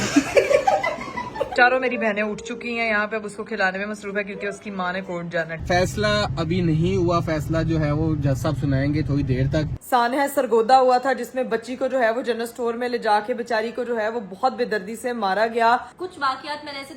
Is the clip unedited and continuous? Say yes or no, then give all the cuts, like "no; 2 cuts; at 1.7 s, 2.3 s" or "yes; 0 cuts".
no; 4 cuts; at 1.5 s, 5.6 s, 9.8 s, 15.9 s